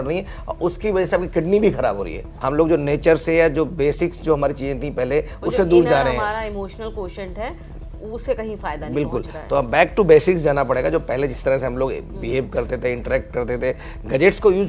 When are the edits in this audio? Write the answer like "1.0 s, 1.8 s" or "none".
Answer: 2.3 s